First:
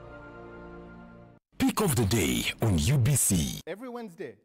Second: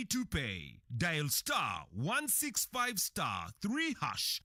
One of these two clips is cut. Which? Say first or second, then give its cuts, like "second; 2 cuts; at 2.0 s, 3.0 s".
first; 1 cut; at 1.3 s